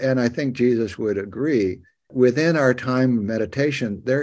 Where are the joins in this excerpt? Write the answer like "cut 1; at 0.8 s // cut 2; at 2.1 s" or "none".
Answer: cut 1; at 2.1 s